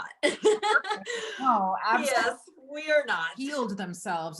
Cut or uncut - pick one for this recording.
cut